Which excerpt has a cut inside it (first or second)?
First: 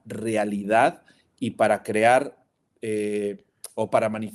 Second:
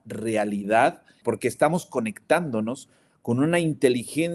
second